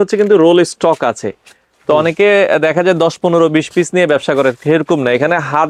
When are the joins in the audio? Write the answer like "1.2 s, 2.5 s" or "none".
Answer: none